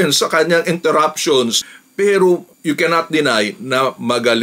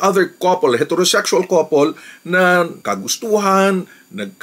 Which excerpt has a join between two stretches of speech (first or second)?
first